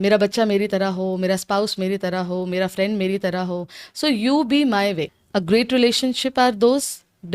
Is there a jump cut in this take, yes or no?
yes